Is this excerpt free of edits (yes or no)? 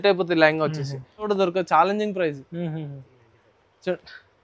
no